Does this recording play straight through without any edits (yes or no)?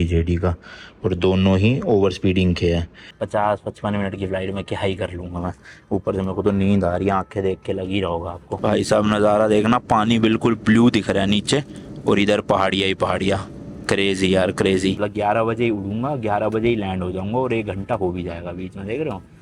no